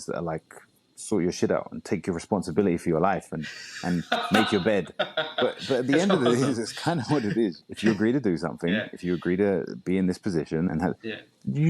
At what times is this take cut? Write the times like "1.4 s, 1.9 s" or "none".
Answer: 7.7 s, 10.7 s